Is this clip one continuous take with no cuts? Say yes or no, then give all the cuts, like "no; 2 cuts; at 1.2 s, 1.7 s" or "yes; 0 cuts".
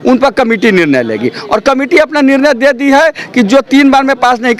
yes; 0 cuts